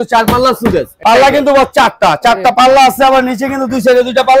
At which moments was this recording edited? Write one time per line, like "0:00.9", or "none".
0:00.9